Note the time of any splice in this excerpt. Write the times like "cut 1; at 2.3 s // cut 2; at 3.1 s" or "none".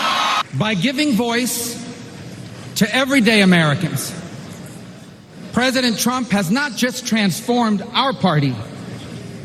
none